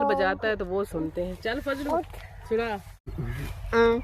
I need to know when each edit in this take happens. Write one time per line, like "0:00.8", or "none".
0:03.1